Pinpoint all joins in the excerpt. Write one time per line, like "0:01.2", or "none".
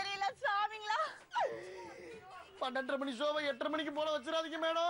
0:01.2